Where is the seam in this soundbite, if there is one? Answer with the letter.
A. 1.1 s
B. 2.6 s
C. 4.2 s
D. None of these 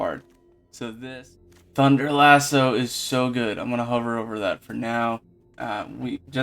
A